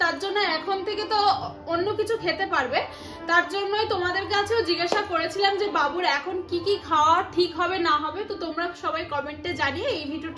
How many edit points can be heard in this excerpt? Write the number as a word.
zero